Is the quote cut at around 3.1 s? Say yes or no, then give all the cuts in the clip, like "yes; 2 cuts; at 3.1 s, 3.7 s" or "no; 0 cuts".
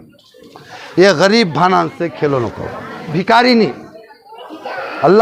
yes; 1 cut; at 3.1 s